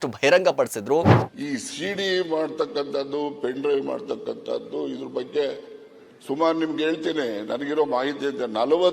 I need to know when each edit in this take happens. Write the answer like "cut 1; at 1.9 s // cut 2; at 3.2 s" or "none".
cut 1; at 1.2 s